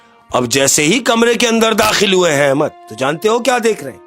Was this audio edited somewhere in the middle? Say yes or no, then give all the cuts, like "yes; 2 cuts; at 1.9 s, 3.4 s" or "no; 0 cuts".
yes; 1 cut; at 2.8 s